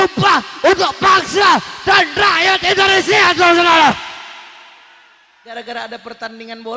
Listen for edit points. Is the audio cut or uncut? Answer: cut